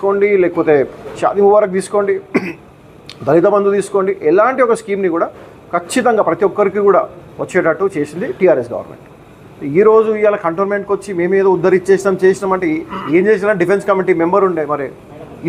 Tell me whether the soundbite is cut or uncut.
uncut